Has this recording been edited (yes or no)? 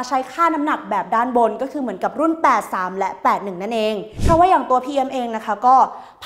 yes